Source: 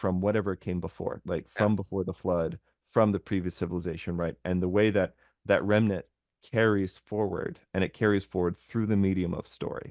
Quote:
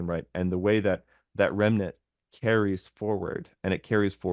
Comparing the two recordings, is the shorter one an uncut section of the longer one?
yes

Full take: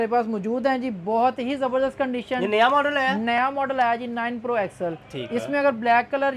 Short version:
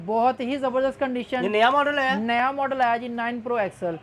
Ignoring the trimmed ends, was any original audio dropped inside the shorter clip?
no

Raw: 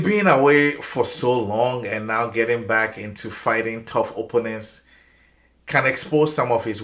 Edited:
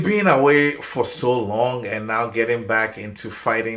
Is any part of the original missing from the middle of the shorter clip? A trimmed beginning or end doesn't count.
no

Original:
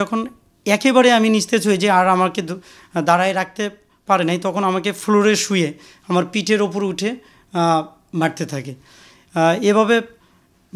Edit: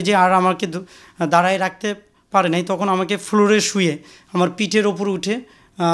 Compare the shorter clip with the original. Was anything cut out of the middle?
no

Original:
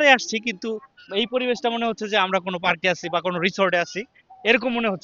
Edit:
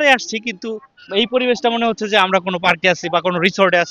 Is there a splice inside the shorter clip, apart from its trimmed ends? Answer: no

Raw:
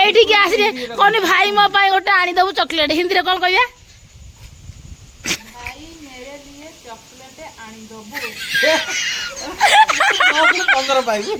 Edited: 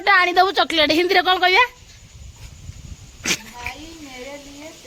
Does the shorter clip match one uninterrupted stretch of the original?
yes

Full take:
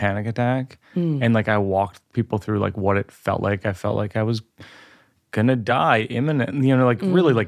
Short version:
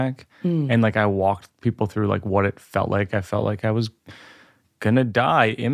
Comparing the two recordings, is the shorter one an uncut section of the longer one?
yes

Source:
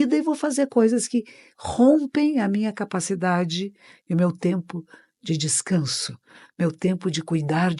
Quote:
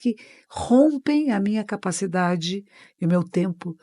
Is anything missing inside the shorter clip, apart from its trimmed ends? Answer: no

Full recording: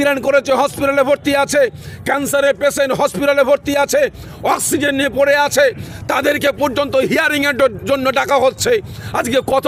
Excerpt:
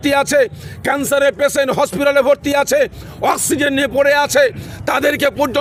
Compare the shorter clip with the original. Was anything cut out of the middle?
no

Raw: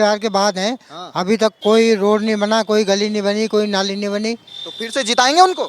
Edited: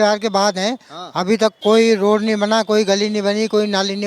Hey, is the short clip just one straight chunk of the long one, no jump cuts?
yes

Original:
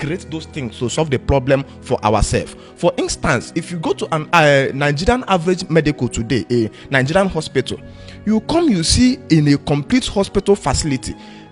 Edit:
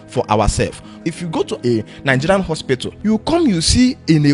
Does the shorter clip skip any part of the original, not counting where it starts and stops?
yes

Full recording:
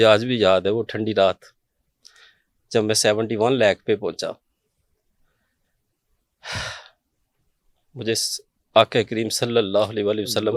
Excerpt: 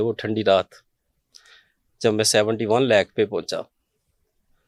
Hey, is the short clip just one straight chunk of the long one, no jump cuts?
yes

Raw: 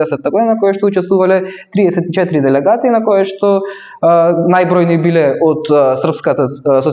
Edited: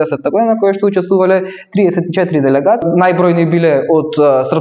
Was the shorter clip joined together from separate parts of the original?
yes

